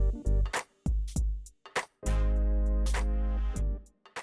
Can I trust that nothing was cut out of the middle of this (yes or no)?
yes